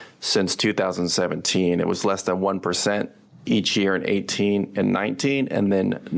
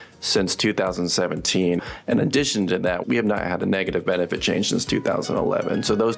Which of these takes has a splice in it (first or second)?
second